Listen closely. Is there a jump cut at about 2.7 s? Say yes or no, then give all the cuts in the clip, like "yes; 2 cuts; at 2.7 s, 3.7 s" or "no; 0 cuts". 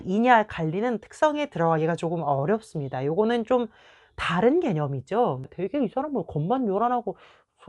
no; 1 cut; at 5.5 s